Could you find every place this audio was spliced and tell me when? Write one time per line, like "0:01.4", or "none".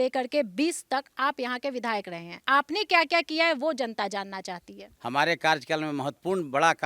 0:04.9